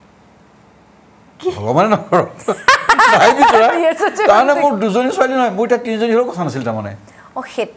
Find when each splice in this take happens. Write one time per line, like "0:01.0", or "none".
none